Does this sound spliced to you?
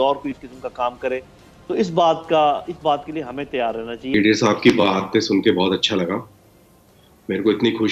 yes; 1 cut; at 4.0 s

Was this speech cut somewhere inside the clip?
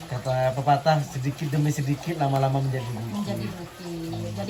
no; 0 cuts

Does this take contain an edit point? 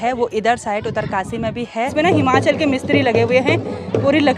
yes; 1 cut; at 1.9 s

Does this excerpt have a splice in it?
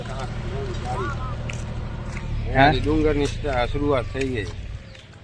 no; 0 cuts

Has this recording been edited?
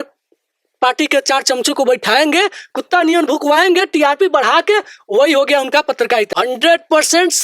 yes; 1 cut; at 6.3 s

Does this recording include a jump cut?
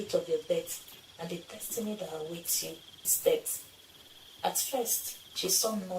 yes; 1 cut; at 3.1 s

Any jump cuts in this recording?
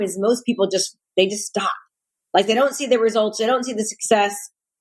no; 0 cuts

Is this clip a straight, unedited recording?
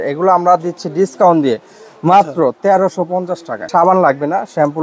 no; 1 cut; at 3.7 s

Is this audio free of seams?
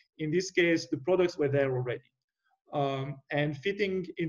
yes; 0 cuts

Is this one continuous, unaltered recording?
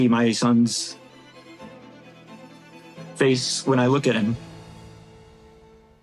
yes; 0 cuts

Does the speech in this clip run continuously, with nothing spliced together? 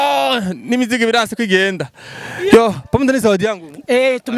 yes; 0 cuts

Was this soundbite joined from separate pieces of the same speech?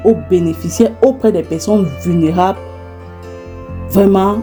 no; 0 cuts

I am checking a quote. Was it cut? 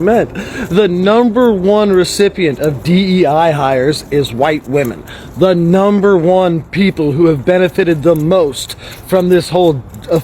no; 0 cuts

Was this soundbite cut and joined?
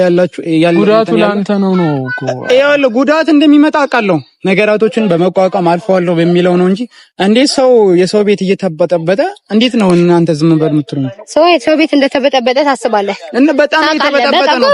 no; 0 cuts

